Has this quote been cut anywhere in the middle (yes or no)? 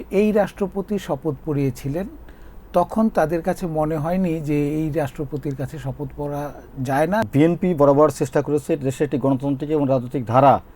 yes